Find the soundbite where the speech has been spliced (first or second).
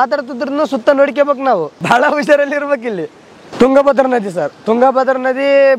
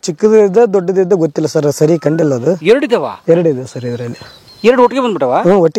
first